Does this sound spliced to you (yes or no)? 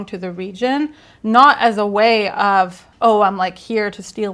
yes